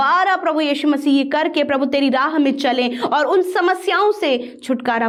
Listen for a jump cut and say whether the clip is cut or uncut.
uncut